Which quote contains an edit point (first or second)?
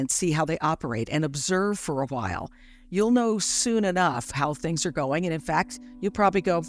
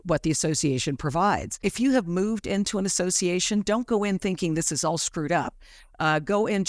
second